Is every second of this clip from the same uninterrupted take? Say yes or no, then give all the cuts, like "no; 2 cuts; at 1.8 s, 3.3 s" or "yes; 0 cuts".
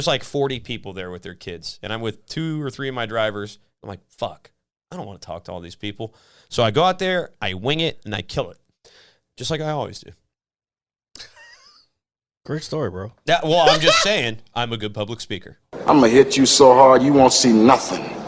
no; 1 cut; at 15.7 s